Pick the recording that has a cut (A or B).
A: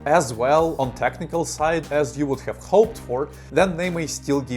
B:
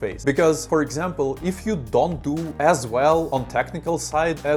A